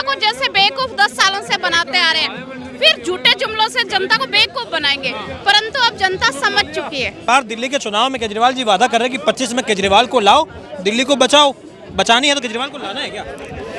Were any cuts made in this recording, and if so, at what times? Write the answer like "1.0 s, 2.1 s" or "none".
7.1 s